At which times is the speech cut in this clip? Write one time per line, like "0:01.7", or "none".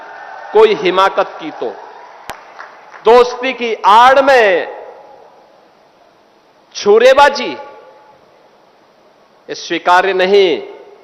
0:02.4